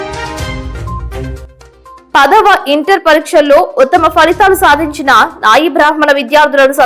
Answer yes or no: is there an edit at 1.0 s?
yes